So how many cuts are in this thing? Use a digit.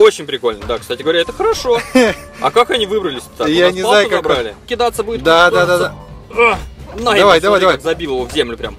1